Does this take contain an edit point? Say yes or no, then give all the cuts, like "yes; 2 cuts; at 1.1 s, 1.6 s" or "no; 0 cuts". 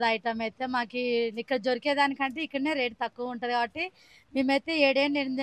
no; 0 cuts